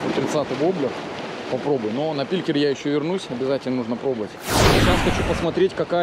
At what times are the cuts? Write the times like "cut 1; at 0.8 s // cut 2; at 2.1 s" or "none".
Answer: cut 1; at 4.8 s